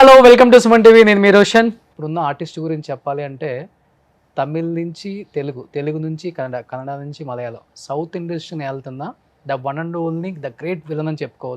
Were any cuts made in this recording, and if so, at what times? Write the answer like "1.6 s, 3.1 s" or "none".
1.9 s